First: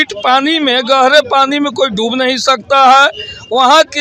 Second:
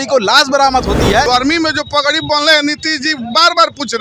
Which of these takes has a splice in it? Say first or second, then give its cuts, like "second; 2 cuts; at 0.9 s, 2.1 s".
second; 1 cut; at 1.2 s